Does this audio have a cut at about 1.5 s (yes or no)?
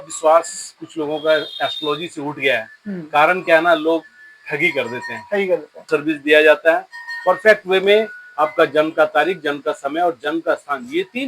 no